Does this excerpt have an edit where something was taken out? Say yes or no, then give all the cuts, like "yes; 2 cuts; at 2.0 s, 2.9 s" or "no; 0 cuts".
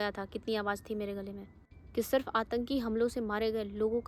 yes; 1 cut; at 1.8 s